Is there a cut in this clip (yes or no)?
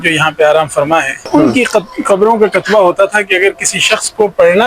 yes